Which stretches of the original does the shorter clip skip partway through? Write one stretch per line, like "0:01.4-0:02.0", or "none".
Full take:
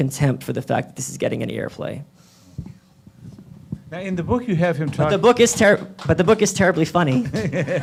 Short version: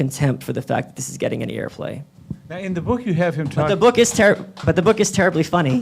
0:02.1-0:03.5